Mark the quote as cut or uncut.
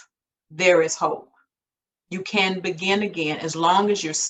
uncut